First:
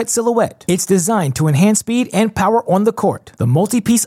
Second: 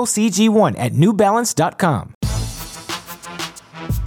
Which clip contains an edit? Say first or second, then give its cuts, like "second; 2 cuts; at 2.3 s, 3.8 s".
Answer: second; 1 cut; at 2.2 s